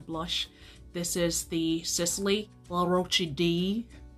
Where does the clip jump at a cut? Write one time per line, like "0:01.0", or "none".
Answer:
0:02.6